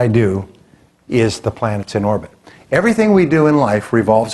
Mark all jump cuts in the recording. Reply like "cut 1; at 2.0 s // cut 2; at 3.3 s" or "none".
none